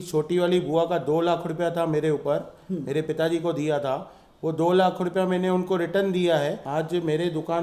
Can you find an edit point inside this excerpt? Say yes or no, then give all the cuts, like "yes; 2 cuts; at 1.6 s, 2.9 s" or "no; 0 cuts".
yes; 1 cut; at 6.6 s